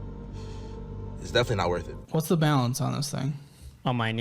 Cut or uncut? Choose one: cut